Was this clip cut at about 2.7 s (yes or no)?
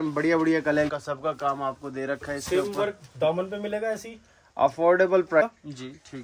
no